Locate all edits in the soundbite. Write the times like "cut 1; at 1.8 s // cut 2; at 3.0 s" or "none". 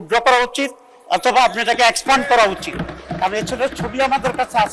none